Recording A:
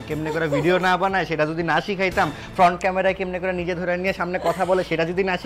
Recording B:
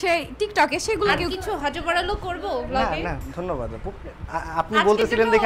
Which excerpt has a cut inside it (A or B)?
B